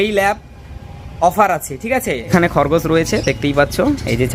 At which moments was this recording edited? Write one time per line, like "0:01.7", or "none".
0:02.3

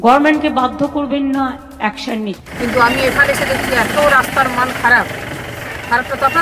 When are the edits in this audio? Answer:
0:02.4

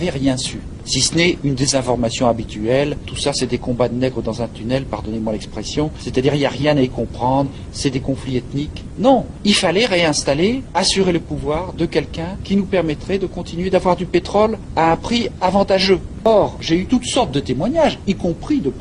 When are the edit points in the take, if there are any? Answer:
0:16.1

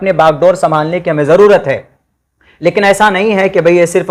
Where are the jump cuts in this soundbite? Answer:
none

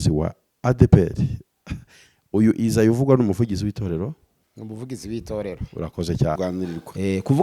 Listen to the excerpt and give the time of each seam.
0:06.4

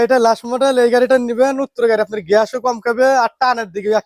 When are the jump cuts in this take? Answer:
none

